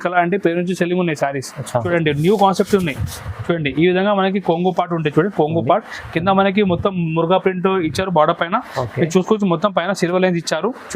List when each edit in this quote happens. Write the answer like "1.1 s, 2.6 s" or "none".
1.9 s

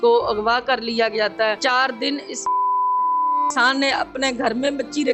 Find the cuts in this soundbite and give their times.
1.6 s

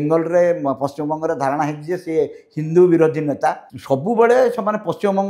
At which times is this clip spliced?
3.7 s

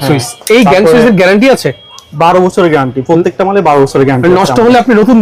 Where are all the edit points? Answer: none

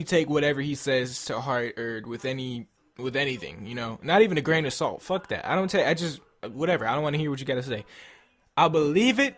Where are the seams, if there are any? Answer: 5.0 s

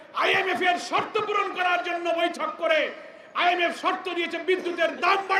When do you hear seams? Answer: none

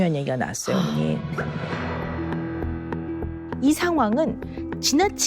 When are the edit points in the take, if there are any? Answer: 0.9 s

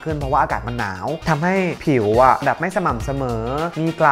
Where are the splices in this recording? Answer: 1.2 s

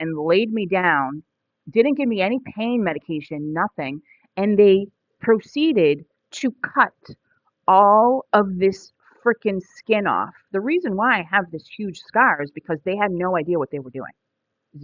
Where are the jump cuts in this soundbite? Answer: none

